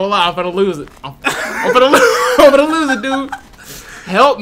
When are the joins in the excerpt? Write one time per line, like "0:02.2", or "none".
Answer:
none